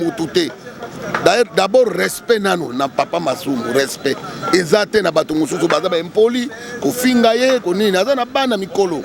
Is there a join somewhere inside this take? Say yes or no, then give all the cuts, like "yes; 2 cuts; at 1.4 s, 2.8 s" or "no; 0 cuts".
no; 0 cuts